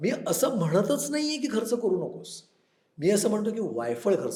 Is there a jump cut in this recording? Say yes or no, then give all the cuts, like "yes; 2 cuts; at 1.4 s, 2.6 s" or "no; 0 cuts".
no; 0 cuts